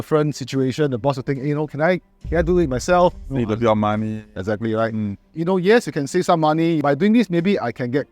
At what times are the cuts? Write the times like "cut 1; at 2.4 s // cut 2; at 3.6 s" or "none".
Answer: cut 1; at 5.3 s // cut 2; at 6.8 s